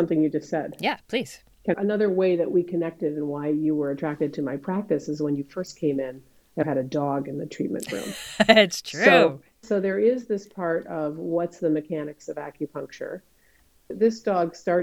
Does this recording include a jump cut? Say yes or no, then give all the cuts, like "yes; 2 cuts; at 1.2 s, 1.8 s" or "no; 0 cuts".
yes; 3 cuts; at 1.8 s, 6.6 s, 13.9 s